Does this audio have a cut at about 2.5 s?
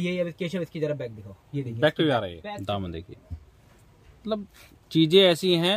yes; 1 cut; at 2.5 s

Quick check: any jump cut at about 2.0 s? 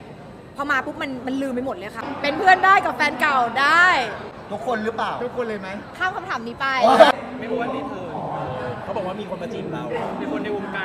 yes; 2 cuts; at 2.0 s, 7.1 s

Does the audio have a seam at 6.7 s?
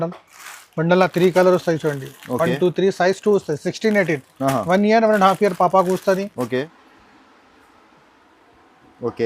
yes; 1 cut; at 6.7 s

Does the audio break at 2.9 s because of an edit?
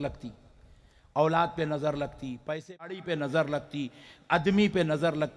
yes; 1 cut; at 2.9 s

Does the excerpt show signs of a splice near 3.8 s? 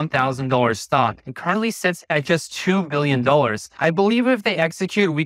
no; 0 cuts

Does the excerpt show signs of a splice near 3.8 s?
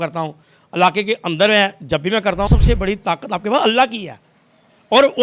no; 1 cut; at 2.5 s

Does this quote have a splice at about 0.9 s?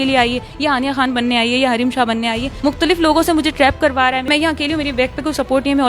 no; 2 cuts; at 2.5 s, 4.3 s

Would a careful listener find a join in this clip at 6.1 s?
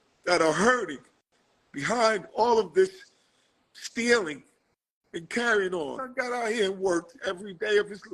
yes; 1 cut; at 6.1 s

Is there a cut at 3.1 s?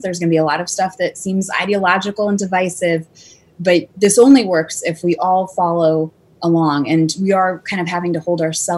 no; 0 cuts

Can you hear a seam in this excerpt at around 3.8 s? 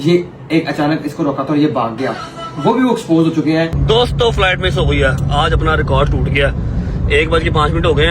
yes; 1 cut; at 3.8 s

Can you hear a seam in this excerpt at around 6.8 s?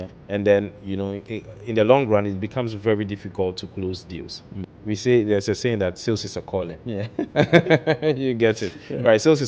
no; 1 cut; at 4.6 s

